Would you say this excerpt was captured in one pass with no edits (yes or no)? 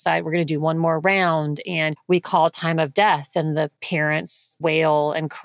no